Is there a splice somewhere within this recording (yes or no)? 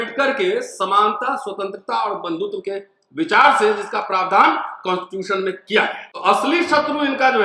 yes